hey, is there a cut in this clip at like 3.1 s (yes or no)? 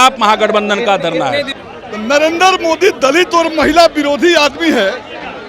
no